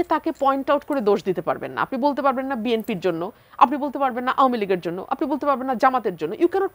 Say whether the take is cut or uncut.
uncut